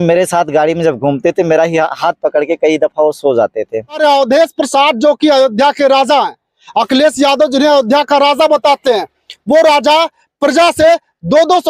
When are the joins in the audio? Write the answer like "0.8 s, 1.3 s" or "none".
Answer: 4.0 s